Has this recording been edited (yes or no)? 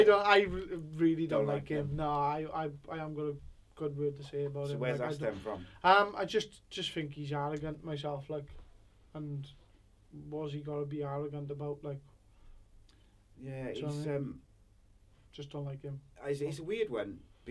no